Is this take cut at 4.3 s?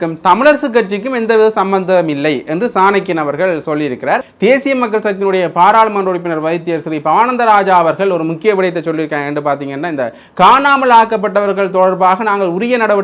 yes; 1 cut; at 4.3 s

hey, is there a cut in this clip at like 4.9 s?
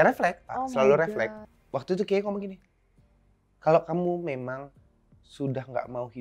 no; 1 cut; at 1.4 s

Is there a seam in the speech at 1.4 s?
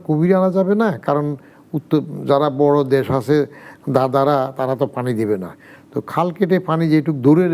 no; 0 cuts

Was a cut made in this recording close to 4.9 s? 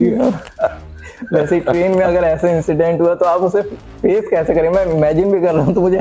no; 0 cuts

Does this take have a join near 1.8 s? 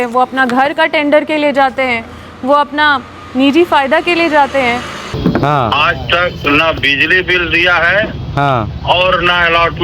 no; 1 cut; at 5.1 s

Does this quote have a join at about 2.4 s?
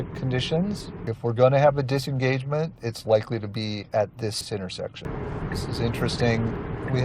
no; 2 cuts; at 0.9 s, 5.0 s

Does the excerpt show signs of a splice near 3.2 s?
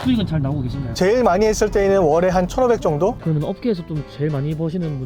yes; 1 cut; at 3.2 s

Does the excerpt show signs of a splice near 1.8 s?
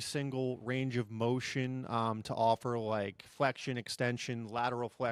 no; 0 cuts

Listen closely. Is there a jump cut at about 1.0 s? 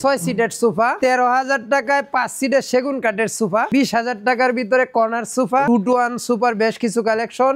yes; 3 cuts; at 1.0 s, 3.7 s, 5.7 s

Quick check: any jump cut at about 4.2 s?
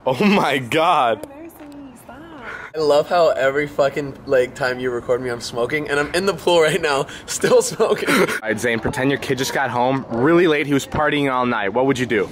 no; 1 cut; at 6.8 s

